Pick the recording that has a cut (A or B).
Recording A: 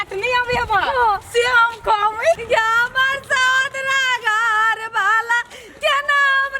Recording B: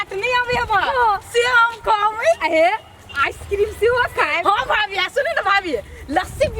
A